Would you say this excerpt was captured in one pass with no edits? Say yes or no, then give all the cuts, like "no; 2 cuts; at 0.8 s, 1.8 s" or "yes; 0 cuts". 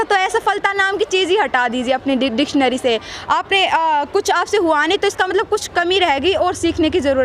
yes; 0 cuts